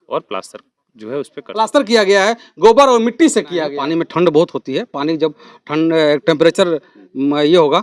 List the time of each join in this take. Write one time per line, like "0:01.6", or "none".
0:01.4
0:03.7

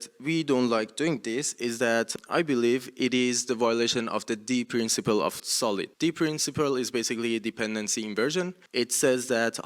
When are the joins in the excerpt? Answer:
0:02.1
0:05.5
0:08.6

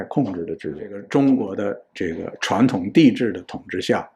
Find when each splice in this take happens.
0:00.9

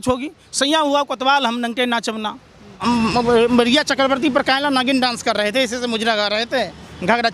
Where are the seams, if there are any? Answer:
0:02.8

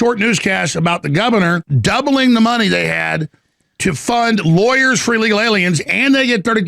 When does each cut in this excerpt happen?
0:01.7

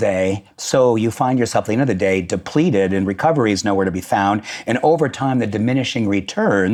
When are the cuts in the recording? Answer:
none

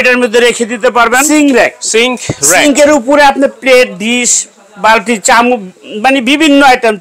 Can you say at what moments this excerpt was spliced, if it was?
0:01.2

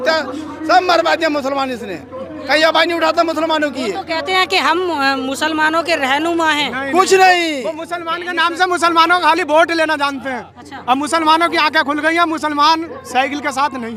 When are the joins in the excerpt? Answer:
none

